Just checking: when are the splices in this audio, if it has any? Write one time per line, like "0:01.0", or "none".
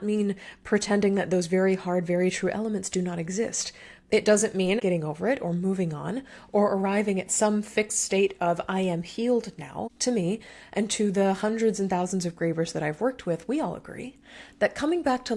0:04.8
0:09.9

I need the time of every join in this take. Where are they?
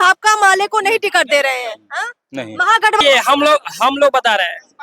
0:03.0

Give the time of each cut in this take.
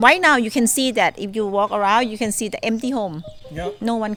none

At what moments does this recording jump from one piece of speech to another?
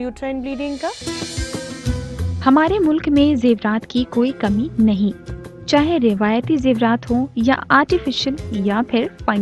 0:01.0
0:02.4

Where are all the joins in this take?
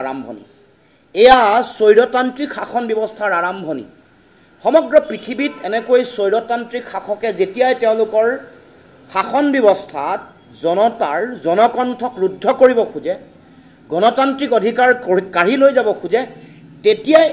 none

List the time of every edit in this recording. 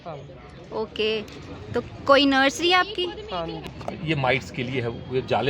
0:03.6

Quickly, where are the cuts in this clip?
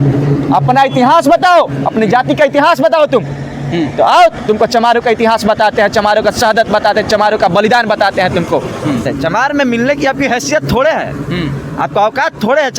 0:09.1

